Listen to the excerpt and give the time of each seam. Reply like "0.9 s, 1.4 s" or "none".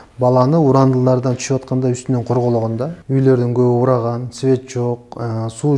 3.0 s